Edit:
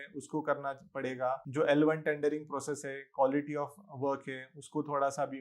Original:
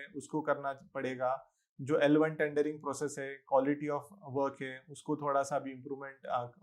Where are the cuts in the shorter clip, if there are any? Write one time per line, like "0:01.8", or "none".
0:01.4

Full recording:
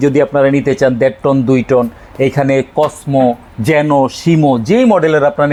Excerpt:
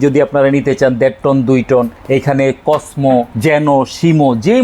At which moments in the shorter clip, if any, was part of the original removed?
0:02.0
0:03.3

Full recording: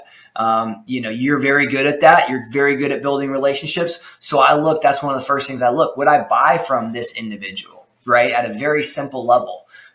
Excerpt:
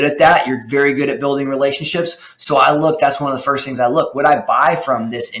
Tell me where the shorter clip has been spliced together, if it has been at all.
none

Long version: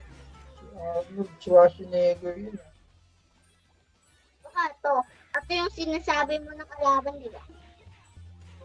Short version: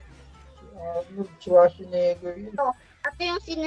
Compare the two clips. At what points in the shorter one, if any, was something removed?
0:02.6

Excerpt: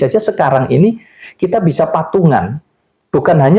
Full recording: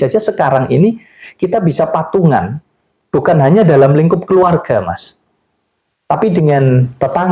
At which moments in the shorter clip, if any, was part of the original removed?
none

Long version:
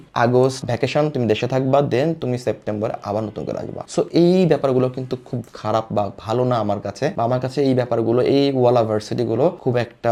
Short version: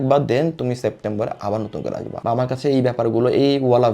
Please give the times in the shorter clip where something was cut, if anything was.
0:02.2

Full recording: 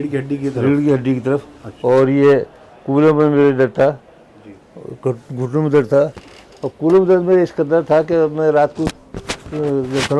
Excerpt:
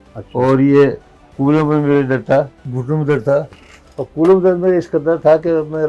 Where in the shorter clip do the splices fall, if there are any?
0:02.7

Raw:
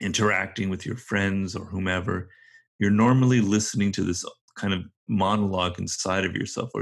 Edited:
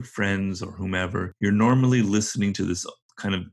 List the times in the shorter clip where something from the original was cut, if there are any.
0:01.3

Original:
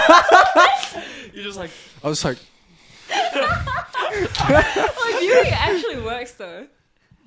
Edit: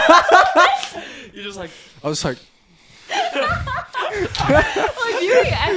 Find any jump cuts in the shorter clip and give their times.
none

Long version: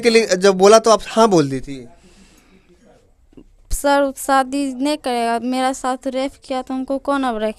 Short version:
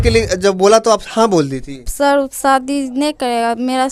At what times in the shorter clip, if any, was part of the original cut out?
0:01.8

